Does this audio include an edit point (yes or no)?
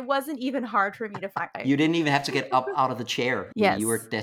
yes